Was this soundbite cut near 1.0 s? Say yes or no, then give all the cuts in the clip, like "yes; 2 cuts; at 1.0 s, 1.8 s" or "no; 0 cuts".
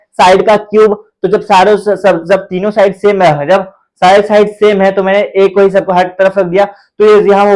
no; 0 cuts